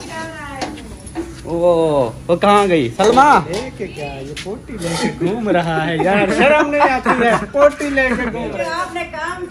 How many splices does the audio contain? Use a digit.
1